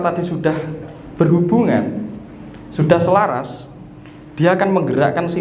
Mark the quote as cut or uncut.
uncut